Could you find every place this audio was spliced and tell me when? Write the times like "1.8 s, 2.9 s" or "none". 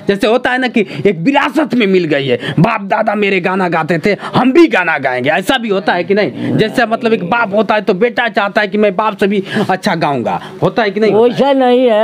none

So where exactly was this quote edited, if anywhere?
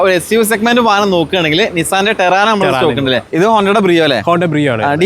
3.3 s

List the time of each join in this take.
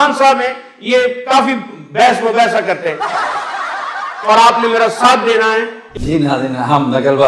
3.0 s, 4.2 s

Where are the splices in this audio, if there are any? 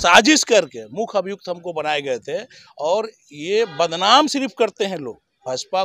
none

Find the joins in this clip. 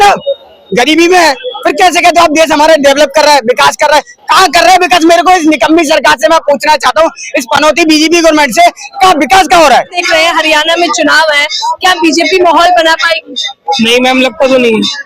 10.0 s

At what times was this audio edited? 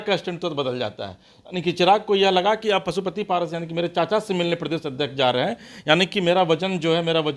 none

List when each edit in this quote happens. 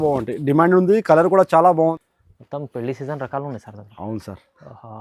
1.9 s

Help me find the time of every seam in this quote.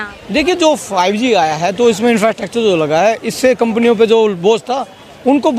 none

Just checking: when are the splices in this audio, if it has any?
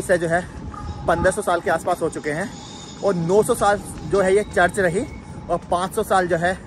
none

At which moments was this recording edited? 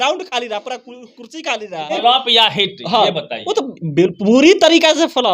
1.9 s

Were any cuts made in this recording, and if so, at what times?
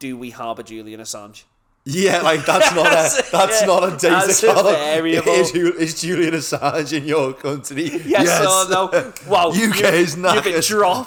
none

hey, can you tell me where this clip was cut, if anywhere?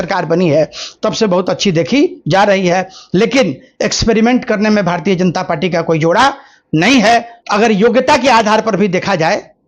7.4 s

